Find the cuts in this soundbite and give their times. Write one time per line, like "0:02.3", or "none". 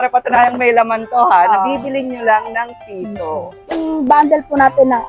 0:03.7